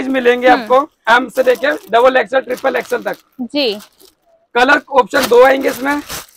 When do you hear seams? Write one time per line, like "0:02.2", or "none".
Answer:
none